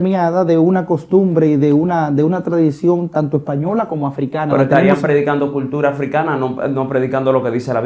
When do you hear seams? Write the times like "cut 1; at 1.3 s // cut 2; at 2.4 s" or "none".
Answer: none